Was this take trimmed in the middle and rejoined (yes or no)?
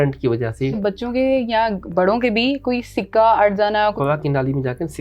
yes